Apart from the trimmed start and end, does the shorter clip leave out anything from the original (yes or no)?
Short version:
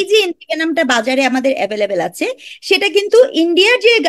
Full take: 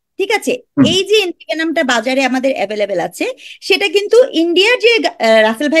no